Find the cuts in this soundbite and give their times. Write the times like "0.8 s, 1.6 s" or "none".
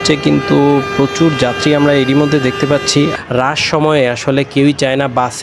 3.2 s